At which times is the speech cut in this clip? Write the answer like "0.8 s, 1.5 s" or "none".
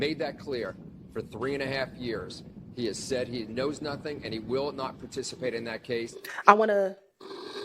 6.2 s